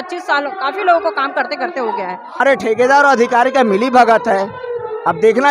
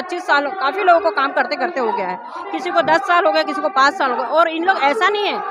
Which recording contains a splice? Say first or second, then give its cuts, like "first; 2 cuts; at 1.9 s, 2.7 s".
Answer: first; 1 cut; at 2.4 s